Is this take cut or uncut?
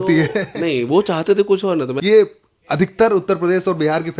cut